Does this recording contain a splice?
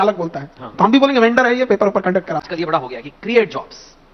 yes; 1 cut; at 2.4 s

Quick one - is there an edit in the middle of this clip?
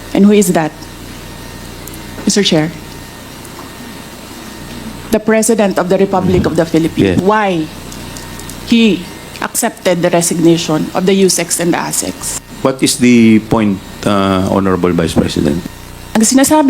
yes; 2 cuts; at 7.2 s, 12.4 s

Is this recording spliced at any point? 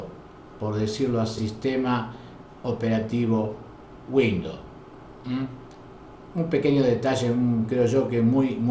no; 0 cuts

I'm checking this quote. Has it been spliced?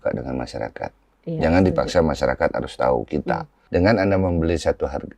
yes; 1 cut; at 3.5 s

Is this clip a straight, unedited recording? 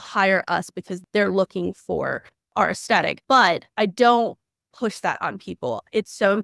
no; 3 cuts; at 0.9 s, 2.4 s, 3.6 s

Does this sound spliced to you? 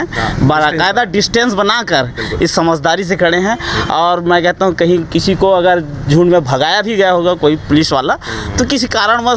no; 0 cuts

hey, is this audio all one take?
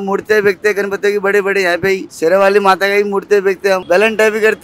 no; 2 cuts; at 2.1 s, 3.8 s

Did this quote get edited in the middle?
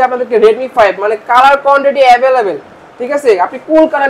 no; 0 cuts

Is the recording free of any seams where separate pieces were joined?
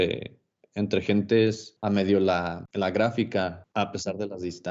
no; 3 cuts; at 1.7 s, 2.6 s, 3.6 s

